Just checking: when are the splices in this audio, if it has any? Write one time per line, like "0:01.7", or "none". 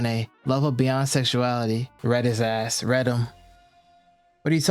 0:01.9